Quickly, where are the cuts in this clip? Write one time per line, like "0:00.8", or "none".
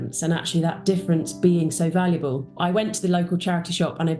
0:02.5